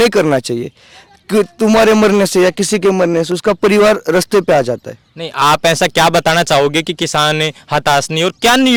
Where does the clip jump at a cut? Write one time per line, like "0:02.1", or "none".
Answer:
none